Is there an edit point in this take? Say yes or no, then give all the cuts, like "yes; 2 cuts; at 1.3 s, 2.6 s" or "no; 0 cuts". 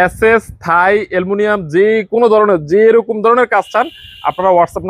no; 0 cuts